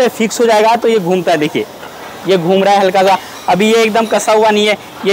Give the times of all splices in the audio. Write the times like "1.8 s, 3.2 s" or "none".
none